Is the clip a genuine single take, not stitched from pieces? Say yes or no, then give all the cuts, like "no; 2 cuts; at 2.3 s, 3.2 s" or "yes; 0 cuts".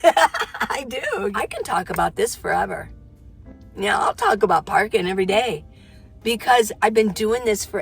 no; 1 cut; at 1.3 s